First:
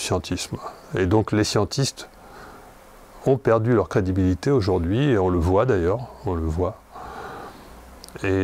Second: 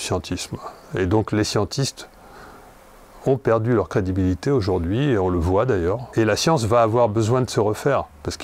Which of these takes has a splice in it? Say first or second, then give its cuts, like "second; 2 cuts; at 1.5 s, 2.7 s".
second; 1 cut; at 6.1 s